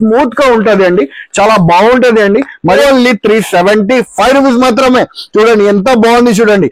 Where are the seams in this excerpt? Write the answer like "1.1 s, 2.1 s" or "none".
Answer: 2.8 s